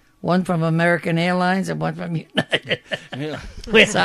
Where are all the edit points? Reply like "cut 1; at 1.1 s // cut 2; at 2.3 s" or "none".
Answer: none